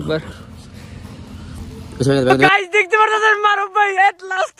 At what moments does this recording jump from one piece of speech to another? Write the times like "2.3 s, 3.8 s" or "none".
2.5 s

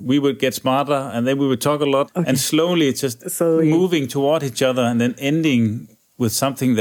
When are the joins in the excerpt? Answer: 2.1 s

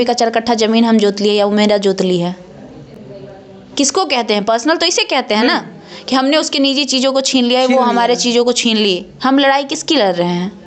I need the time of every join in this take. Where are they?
none

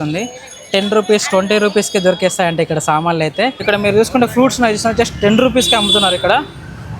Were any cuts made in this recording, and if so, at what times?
3.6 s

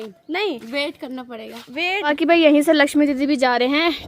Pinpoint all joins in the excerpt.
2.1 s

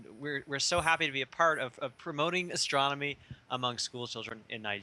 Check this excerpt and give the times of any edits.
3.6 s

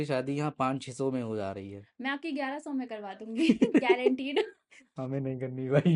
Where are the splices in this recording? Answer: none

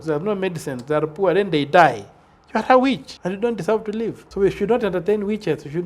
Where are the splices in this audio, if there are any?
3.1 s, 4.2 s

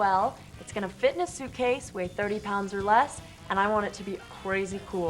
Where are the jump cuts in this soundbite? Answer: 4.2 s

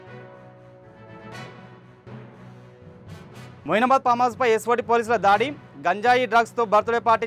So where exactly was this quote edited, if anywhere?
1.0 s

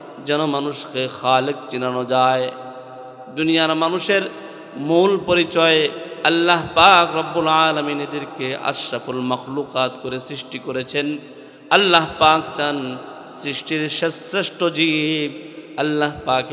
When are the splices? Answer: none

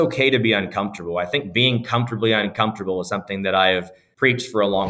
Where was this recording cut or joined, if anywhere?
4.0 s

